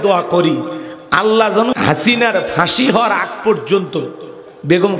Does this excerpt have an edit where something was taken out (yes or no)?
yes